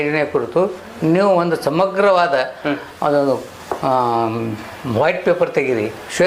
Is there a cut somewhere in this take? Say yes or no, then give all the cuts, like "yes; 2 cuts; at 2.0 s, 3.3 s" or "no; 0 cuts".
no; 0 cuts